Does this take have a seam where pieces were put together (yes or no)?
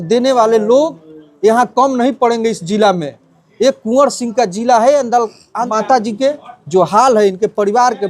yes